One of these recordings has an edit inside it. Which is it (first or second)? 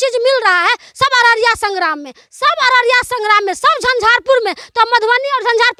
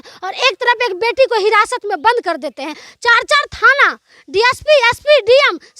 second